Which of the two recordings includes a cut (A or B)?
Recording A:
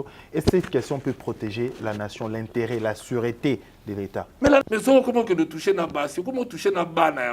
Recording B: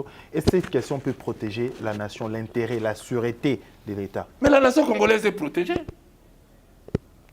A